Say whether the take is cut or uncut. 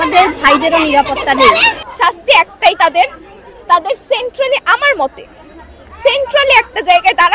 cut